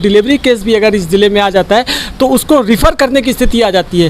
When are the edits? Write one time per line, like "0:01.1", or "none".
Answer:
none